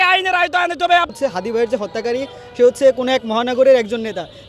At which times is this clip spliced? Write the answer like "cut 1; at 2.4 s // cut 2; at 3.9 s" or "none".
cut 1; at 1.1 s